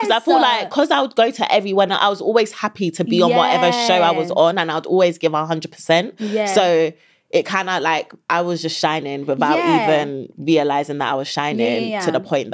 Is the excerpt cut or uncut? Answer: uncut